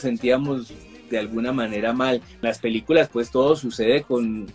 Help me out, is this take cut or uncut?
cut